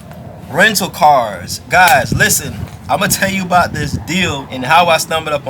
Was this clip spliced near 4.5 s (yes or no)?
yes